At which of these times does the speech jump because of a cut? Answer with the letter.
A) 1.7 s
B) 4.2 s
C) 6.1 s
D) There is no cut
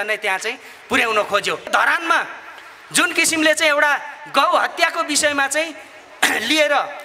A